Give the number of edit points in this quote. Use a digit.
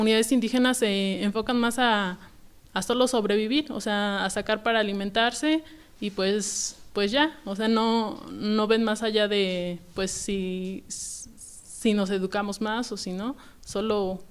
0